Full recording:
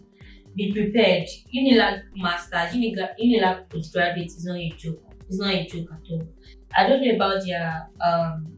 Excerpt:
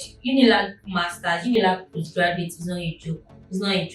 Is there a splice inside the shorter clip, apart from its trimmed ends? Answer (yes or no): yes